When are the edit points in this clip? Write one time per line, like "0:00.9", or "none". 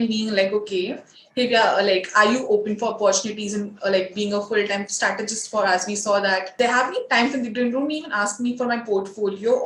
0:06.5